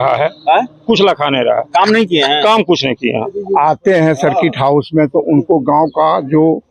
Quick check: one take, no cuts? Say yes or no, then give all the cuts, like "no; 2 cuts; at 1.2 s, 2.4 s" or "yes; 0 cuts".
no; 1 cut; at 3.4 s